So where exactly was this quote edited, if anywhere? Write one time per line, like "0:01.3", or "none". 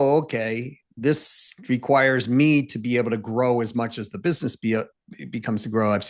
none